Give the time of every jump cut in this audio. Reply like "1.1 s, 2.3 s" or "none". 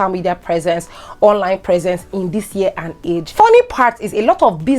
3.3 s